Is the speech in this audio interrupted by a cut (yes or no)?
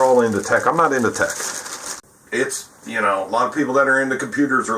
yes